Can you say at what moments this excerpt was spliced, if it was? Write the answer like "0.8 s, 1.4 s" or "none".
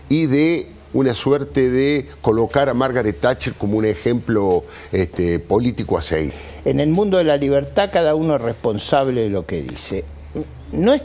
6.4 s